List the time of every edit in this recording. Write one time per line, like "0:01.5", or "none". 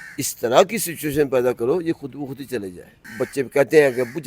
0:03.0